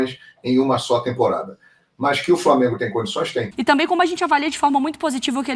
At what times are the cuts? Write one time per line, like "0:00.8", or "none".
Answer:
0:03.5